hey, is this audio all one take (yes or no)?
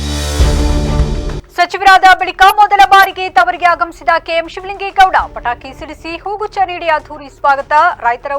no